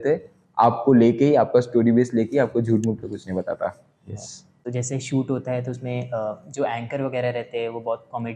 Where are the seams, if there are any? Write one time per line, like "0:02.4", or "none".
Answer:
0:04.5